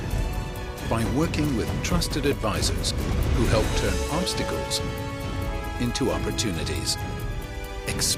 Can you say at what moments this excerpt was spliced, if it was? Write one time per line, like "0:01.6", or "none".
none